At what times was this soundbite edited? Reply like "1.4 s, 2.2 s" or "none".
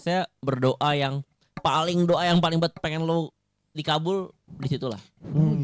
none